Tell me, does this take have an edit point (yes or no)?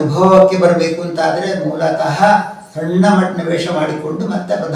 no